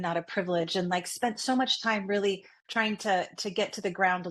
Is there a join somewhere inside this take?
no; 0 cuts

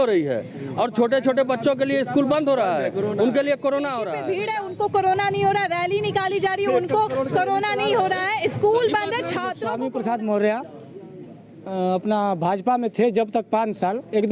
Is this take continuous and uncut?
no; 2 cuts; at 4.2 s, 9.6 s

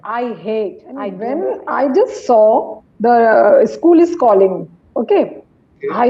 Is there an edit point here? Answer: yes; 1 cut; at 1.2 s

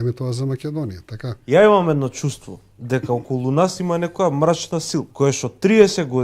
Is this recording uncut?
no; 2 cuts; at 1.4 s, 5.1 s

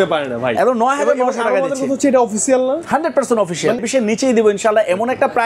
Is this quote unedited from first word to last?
no; 1 cut; at 3.8 s

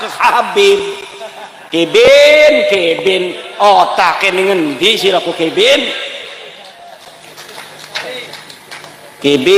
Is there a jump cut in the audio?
no; 0 cuts

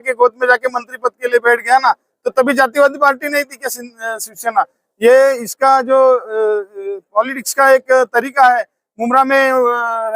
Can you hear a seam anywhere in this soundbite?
no; 0 cuts

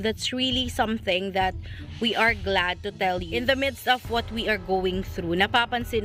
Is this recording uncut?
yes; 0 cuts

